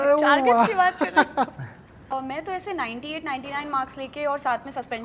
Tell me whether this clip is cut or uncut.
cut